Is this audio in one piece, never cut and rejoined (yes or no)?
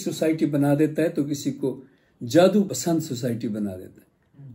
no